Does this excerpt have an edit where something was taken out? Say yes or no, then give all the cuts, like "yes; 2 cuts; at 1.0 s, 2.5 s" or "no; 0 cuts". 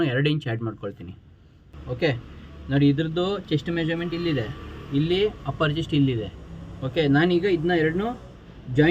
yes; 1 cut; at 1.6 s